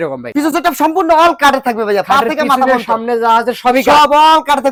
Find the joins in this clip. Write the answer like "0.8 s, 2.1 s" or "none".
none